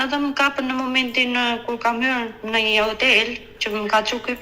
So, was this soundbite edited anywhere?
no; 0 cuts

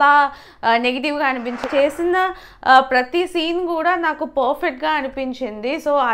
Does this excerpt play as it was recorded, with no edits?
no; 1 cut; at 1.7 s

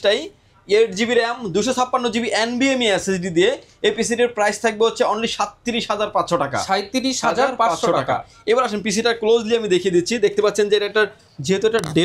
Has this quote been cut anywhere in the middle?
no; 0 cuts

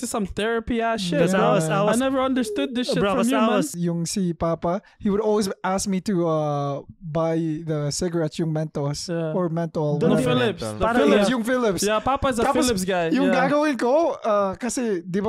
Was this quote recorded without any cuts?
no; 1 cut; at 3.7 s

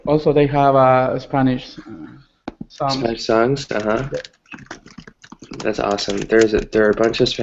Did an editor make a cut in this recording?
yes; 1 cut; at 3.4 s

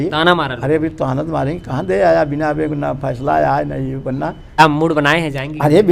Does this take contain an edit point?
yes; 1 cut; at 4.6 s

